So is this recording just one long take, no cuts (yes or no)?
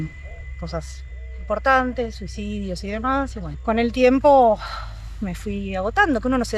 yes